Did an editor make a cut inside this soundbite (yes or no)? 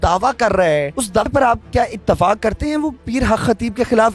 yes